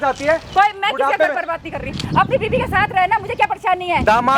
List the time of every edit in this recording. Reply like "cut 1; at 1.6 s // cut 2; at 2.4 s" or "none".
none